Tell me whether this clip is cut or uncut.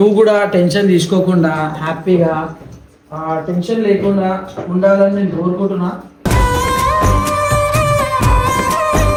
uncut